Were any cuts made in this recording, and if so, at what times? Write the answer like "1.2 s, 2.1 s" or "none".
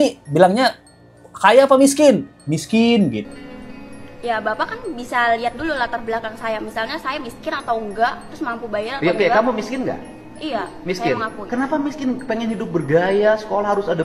none